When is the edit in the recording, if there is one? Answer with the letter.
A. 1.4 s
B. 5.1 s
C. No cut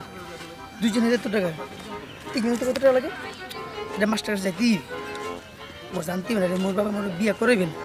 C